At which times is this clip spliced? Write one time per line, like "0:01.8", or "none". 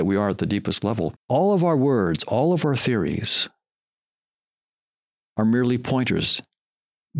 0:01.2